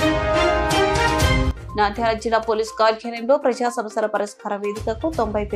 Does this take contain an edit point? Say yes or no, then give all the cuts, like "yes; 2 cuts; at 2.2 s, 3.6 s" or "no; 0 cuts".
yes; 1 cut; at 1.5 s